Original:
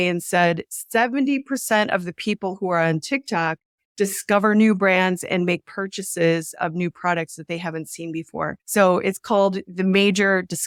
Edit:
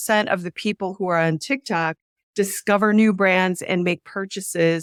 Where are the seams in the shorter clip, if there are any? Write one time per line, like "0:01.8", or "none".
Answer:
none

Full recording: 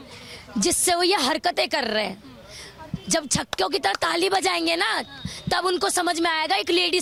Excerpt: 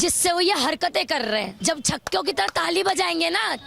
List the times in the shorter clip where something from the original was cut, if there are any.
0:01.6

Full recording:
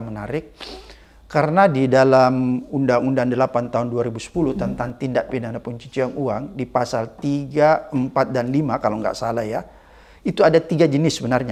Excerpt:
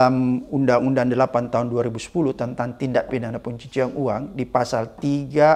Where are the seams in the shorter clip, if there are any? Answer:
none

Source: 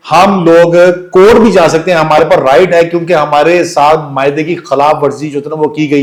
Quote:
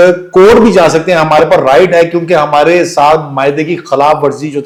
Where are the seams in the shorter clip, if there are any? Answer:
none

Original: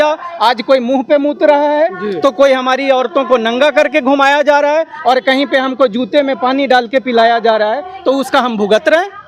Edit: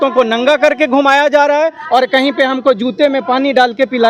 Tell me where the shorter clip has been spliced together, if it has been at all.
none

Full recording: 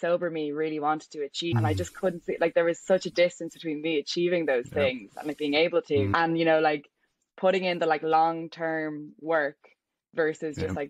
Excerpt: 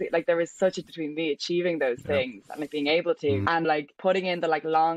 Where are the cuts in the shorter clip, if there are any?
0:00.8
0:03.6

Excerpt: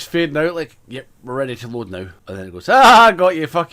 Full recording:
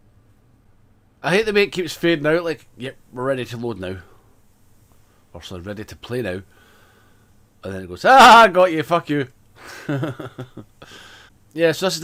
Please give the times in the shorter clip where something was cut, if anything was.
0:02.2

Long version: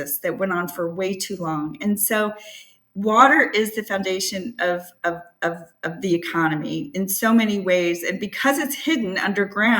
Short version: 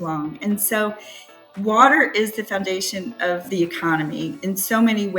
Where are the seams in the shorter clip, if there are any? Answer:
0:03.4

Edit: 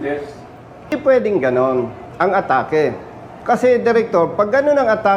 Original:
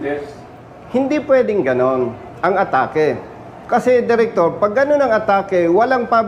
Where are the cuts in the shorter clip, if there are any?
0:00.9

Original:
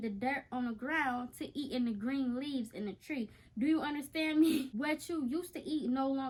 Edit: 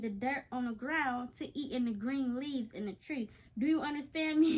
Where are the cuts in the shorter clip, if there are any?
none

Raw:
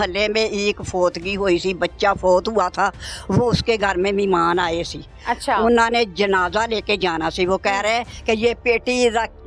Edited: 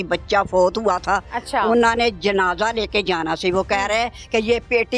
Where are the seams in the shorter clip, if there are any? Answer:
0:01.4

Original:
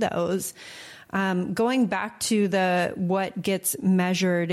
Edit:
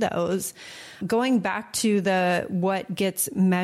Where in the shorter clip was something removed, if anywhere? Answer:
0:01.0

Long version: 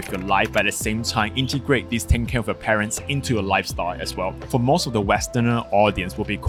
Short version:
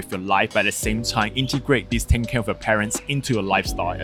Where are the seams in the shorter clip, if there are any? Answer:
none

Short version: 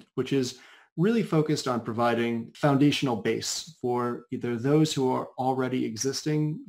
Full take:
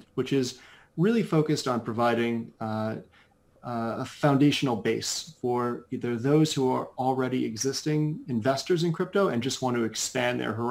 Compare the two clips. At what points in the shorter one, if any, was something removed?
0:02.5

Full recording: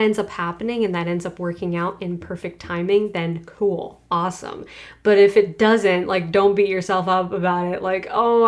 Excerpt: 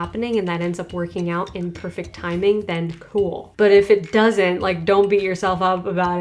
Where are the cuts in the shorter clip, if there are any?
0:03.4

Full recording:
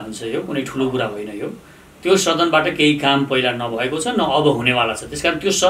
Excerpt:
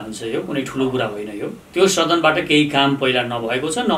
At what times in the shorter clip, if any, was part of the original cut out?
0:01.6

